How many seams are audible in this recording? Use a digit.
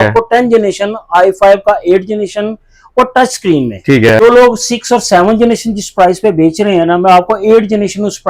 1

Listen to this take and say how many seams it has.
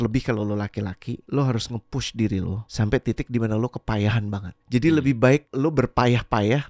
4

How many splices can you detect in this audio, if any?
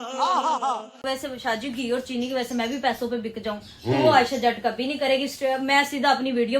2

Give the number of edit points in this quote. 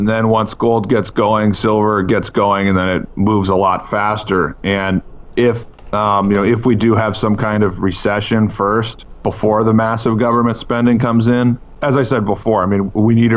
3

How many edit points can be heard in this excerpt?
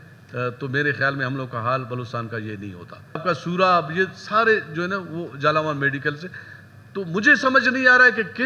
1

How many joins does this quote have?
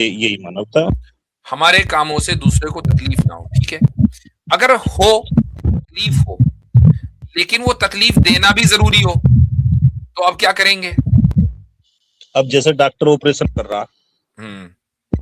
1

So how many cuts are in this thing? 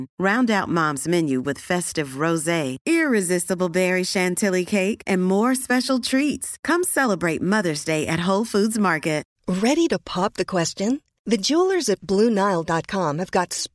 1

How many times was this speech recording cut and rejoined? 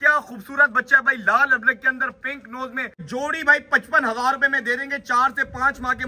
1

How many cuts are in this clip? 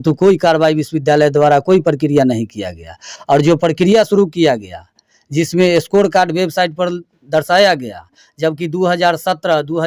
0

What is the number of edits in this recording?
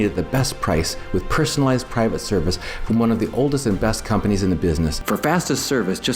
1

